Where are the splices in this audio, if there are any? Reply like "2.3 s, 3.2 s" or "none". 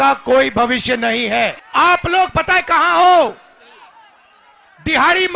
1.6 s